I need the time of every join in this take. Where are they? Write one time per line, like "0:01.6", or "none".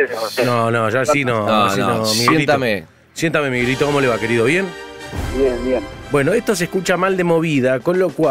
0:02.6